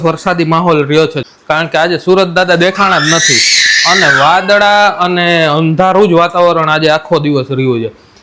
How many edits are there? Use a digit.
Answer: 1